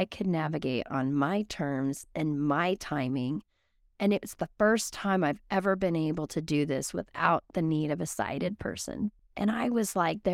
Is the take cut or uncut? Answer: cut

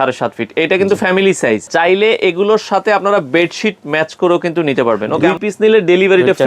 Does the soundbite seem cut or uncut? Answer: cut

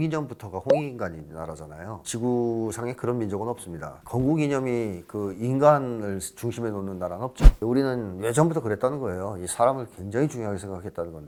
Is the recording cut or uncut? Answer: uncut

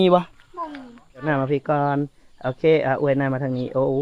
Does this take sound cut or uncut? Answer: cut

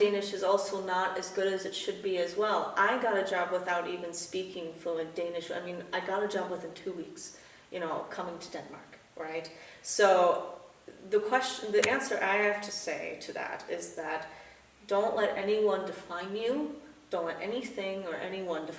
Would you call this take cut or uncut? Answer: uncut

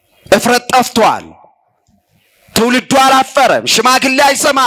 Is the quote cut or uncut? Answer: uncut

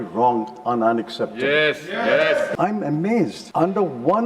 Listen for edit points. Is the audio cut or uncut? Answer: cut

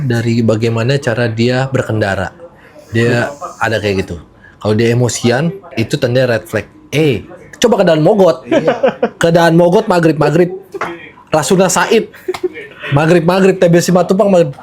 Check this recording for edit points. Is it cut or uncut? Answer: uncut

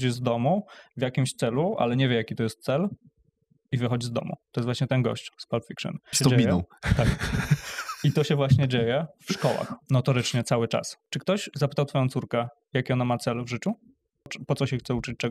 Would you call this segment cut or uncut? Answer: cut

